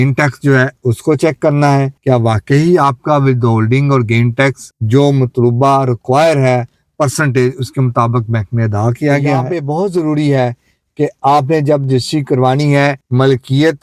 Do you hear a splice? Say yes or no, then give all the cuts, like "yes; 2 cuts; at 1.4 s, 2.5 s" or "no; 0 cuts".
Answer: yes; 1 cut; at 9.5 s